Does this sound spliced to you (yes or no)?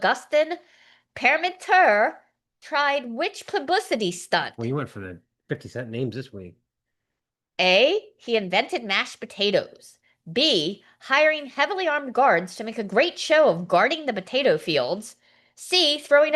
no